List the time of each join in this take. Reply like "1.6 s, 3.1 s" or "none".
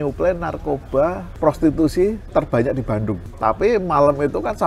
1.3 s, 2.2 s, 3.3 s